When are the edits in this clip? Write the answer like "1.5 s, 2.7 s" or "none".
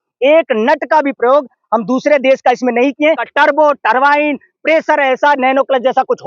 3.3 s